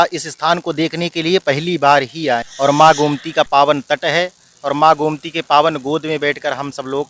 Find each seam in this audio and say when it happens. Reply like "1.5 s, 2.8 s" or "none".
2.5 s